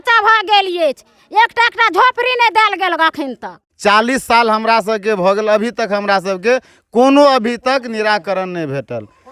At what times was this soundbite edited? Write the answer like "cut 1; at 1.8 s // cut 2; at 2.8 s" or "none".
cut 1; at 3.6 s